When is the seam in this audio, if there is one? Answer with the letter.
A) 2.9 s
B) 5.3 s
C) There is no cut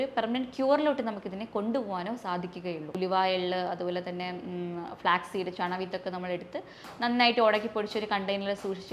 A